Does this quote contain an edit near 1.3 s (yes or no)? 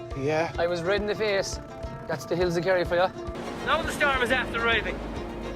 no